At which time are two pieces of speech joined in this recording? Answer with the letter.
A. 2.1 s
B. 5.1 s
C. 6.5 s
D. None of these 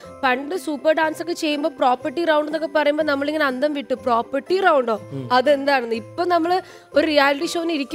D